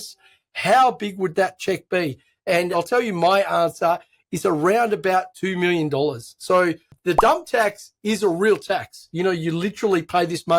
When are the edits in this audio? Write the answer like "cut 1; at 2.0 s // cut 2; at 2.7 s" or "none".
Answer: cut 1; at 2.7 s